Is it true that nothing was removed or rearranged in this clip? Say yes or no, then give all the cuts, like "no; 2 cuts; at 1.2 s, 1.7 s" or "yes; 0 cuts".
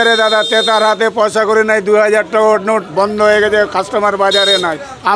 yes; 0 cuts